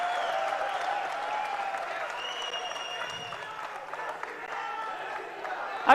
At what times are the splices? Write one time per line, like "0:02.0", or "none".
none